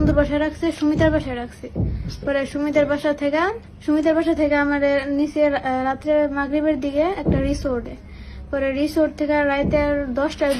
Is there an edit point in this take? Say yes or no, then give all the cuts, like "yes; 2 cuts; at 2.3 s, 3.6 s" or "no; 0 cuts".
yes; 1 cut; at 3.7 s